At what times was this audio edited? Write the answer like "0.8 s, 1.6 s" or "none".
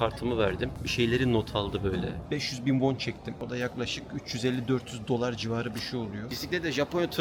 2.2 s, 6.3 s